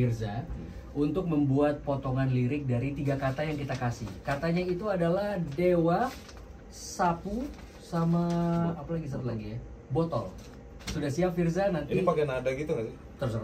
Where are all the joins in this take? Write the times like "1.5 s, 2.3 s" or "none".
none